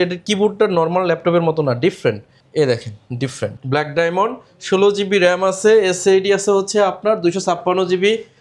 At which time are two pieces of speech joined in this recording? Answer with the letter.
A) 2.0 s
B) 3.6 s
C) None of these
B